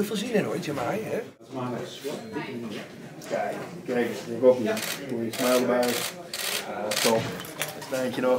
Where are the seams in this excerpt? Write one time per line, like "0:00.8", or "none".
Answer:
none